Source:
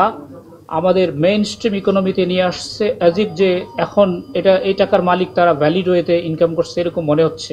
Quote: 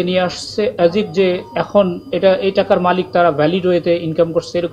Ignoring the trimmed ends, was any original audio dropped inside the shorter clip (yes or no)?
no